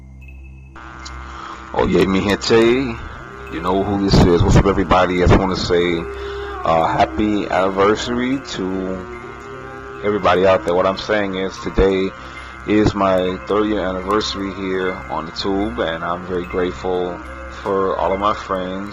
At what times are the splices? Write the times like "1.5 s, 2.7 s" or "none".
5.7 s